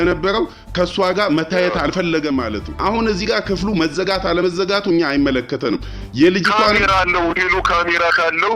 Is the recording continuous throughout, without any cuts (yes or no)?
no